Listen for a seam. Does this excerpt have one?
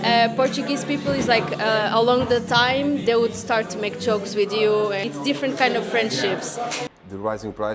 yes; 2 cuts; at 5.1 s, 6.8 s

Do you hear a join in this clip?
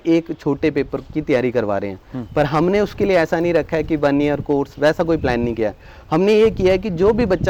no; 0 cuts

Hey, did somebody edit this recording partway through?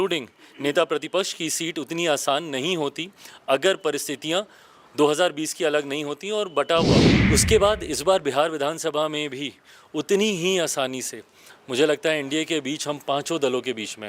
yes; 1 cut; at 7.1 s

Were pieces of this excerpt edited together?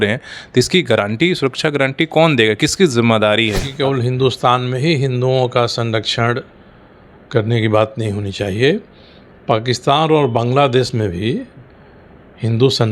yes; 1 cut; at 3.7 s

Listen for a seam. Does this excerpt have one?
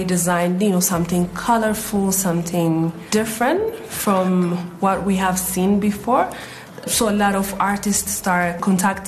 yes; 2 cuts; at 3.0 s, 3.9 s

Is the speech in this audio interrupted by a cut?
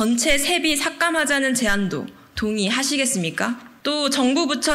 yes; 1 cut; at 3.7 s

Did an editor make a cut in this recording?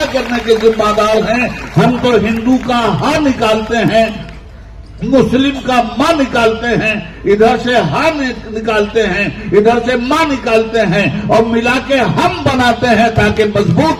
no; 0 cuts

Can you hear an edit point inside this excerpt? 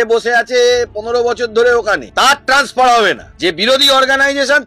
yes; 2 cuts; at 2.1 s, 3.3 s

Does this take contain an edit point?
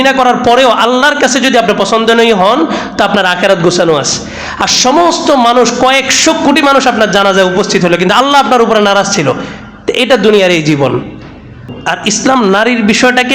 yes; 1 cut; at 11.7 s

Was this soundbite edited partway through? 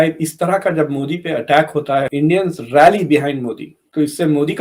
no; 0 cuts

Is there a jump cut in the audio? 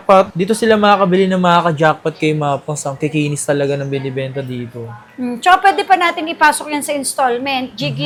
no; 0 cuts

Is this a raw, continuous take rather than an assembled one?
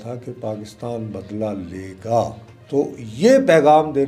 no; 1 cut; at 2.5 s

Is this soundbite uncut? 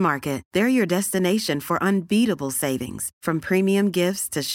yes; 0 cuts

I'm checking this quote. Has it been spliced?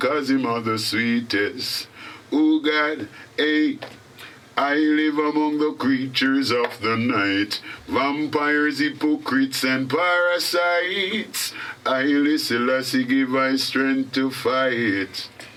no; 0 cuts

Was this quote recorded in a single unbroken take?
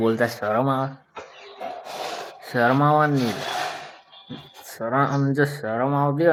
yes; 0 cuts

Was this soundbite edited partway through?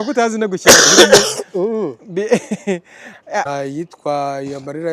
yes; 1 cut; at 3.4 s

